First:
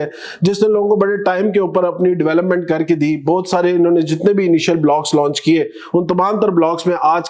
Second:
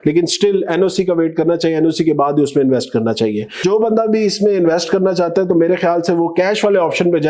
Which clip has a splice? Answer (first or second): second